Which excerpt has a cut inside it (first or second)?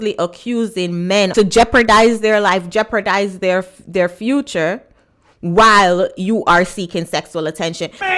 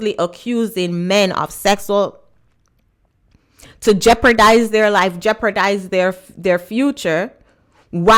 first